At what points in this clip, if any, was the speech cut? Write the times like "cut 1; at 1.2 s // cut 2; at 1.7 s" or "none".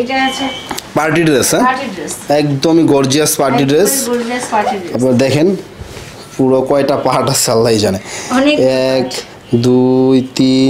none

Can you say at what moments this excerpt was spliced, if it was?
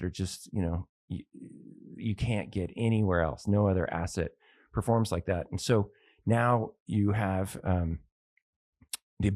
none

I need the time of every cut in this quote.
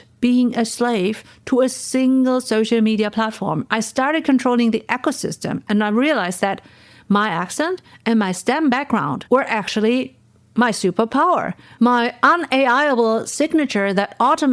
none

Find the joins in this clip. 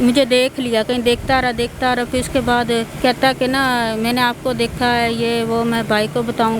cut 1; at 2.9 s

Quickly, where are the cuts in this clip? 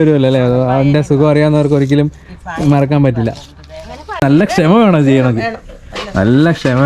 cut 1; at 4.2 s

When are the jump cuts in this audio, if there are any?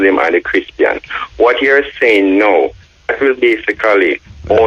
none

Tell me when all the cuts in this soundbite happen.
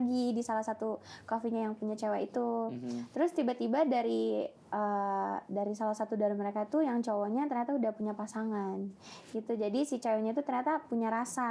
none

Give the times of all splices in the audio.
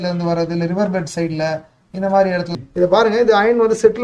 cut 1; at 2.5 s

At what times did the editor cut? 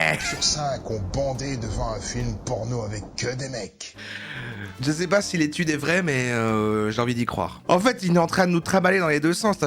cut 1; at 7.6 s

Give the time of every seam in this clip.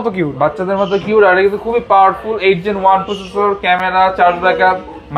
none

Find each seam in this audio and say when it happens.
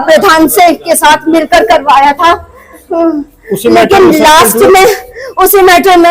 none

